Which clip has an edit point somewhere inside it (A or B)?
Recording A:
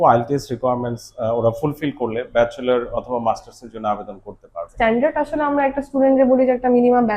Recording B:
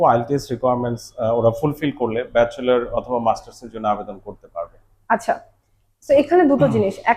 A